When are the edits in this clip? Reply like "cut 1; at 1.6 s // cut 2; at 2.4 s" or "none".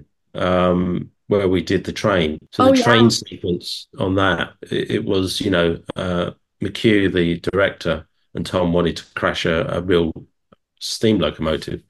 cut 1; at 2.4 s

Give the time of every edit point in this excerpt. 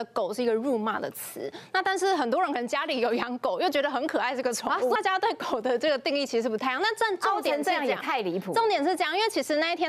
cut 1; at 5.0 s

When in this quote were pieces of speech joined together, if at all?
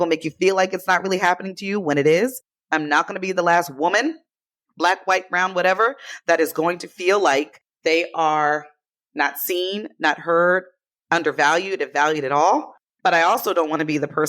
cut 1; at 12.8 s

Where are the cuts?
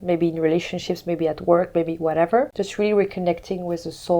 cut 1; at 2.5 s

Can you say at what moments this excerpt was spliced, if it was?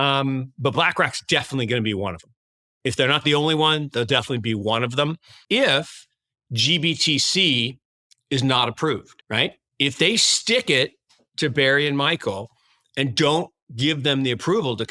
cut 1; at 5.3 s // cut 2; at 9.1 s

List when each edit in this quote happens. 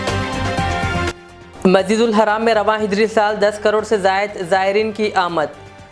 cut 1; at 1.1 s

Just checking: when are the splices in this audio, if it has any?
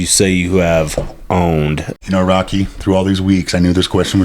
cut 1; at 1.9 s

